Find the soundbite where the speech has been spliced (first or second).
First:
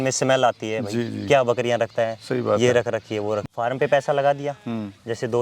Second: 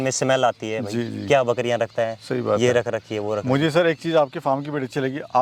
first